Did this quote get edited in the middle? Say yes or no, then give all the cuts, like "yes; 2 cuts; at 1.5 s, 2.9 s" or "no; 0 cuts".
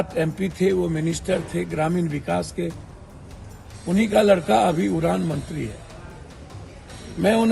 no; 0 cuts